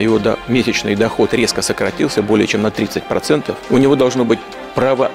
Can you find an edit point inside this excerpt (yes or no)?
yes